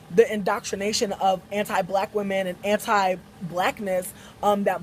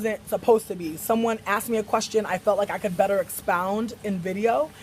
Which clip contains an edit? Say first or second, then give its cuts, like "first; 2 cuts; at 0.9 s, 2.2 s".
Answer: second; 1 cut; at 3.6 s